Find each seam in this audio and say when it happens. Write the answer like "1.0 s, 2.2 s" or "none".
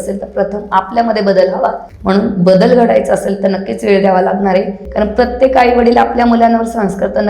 1.9 s, 4.8 s